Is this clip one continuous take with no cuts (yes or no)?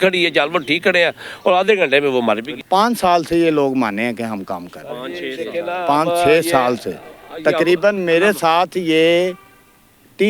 yes